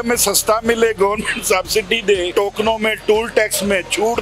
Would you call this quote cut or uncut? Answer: cut